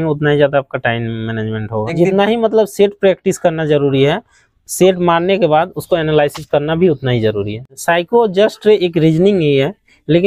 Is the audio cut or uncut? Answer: cut